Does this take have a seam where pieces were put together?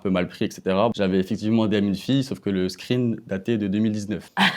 yes; 1 cut; at 0.9 s

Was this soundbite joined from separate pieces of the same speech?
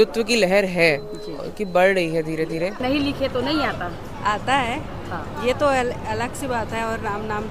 yes; 1 cut; at 2.8 s

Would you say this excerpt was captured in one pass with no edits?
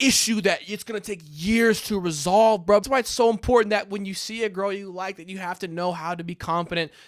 no; 1 cut; at 2.8 s

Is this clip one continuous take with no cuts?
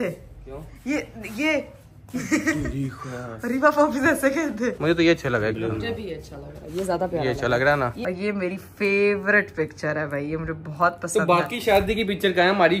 no; 2 cuts; at 4.8 s, 8.0 s

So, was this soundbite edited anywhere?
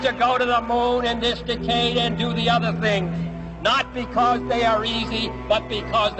yes; 1 cut; at 2.0 s

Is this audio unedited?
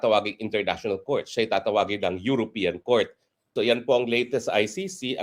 no; 1 cut; at 3.5 s

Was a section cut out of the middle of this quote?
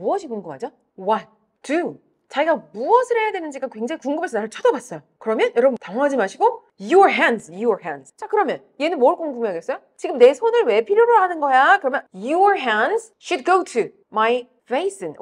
no; 0 cuts

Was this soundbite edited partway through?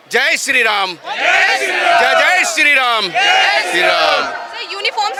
no; 0 cuts

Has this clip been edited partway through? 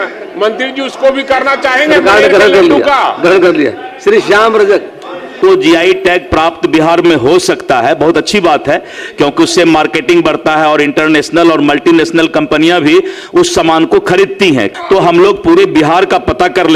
yes; 2 cuts; at 5.4 s, 14.7 s

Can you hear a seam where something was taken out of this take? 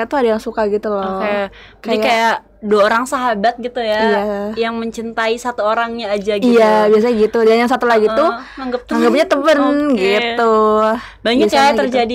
no; 0 cuts

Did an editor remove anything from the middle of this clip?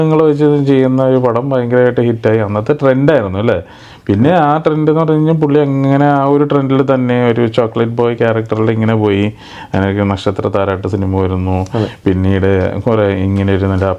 no; 0 cuts

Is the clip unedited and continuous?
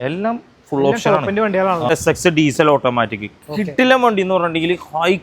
no; 1 cut; at 1.9 s

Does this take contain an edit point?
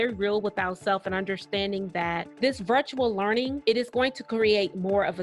yes; 2 cuts; at 2.3 s, 3.6 s

